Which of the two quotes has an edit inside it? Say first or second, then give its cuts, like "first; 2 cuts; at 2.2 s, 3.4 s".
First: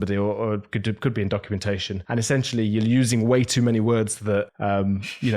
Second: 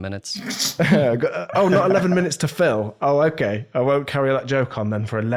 first; 2 cuts; at 1.9 s, 4.5 s